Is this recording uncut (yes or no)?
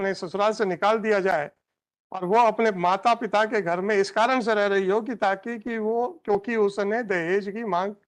yes